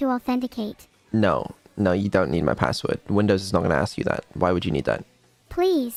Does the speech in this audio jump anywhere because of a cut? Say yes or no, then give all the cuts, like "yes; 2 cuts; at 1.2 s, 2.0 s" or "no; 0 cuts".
no; 0 cuts